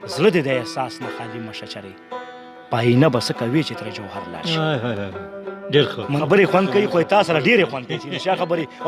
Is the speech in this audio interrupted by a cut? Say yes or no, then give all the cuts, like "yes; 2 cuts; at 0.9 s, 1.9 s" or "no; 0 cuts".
yes; 1 cut; at 6.2 s